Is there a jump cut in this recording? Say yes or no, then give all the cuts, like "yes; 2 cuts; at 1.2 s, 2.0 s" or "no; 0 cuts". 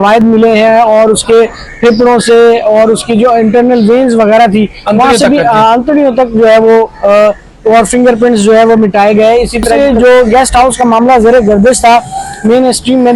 yes; 1 cut; at 9.7 s